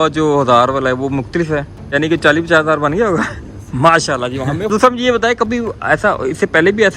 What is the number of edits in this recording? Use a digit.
1